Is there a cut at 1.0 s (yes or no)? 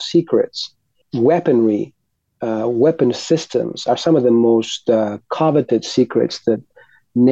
yes